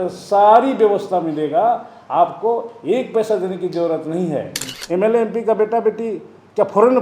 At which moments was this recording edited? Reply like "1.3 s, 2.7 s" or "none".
4.6 s